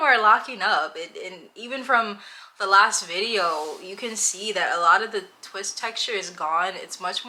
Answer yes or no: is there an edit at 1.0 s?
no